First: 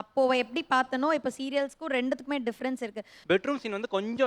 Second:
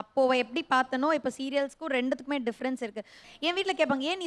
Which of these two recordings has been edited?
first; 1 cut; at 3.1 s

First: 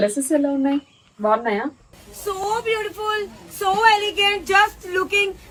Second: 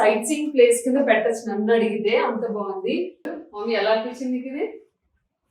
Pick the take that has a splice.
second; 1 cut; at 3.3 s

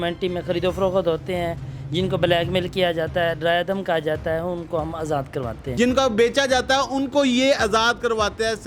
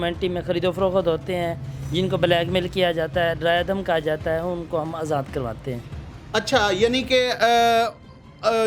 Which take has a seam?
first; 1 cut; at 5.7 s

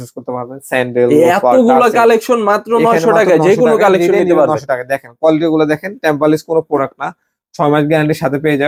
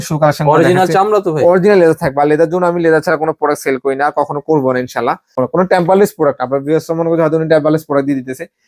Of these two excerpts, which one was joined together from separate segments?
second; 1 cut; at 5.4 s

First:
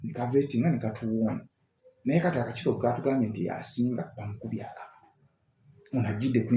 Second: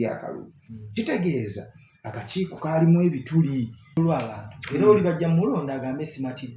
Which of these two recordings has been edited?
second; 1 cut; at 4.0 s

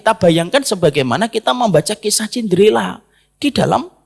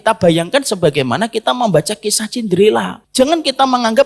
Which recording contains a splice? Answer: second; 1 cut; at 3.0 s

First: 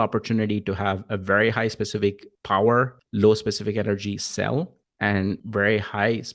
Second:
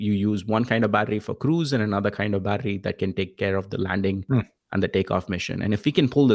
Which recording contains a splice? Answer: first; 3 cuts; at 2.3 s, 3.0 s, 5.2 s

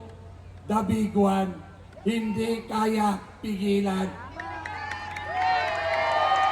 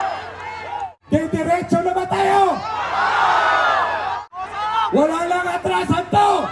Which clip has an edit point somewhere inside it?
second; 2 cuts; at 1.0 s, 4.2 s

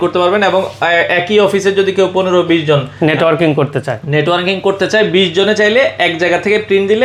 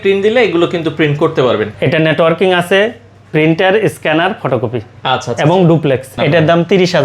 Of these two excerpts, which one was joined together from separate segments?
second; 2 cuts; at 1.7 s, 6.1 s

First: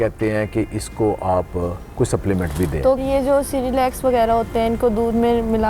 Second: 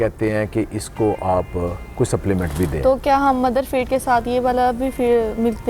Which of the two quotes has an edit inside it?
first; 1 cut; at 3.0 s

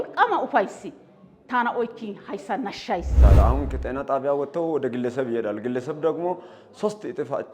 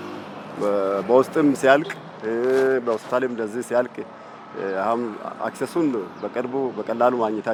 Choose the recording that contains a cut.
first; 1 cut; at 3.4 s

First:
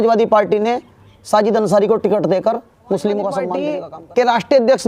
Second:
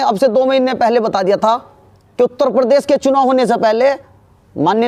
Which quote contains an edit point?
first; 1 cut; at 3.6 s

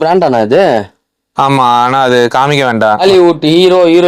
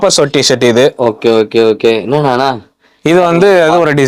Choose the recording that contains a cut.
first; 1 cut; at 3.0 s

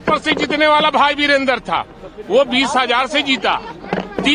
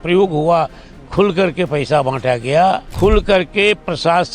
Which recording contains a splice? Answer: second; 1 cut; at 2.9 s

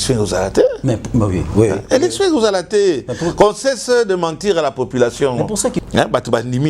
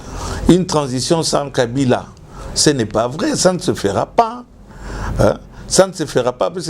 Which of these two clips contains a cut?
first; 1 cut; at 5.8 s

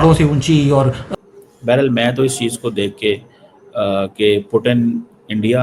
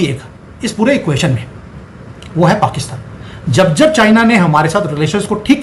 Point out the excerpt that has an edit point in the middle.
first; 1 cut; at 1.1 s

